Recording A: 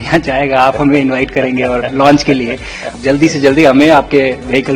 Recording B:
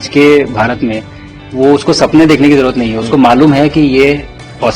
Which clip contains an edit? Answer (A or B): A